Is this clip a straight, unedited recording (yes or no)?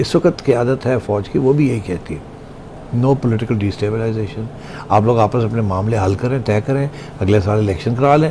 yes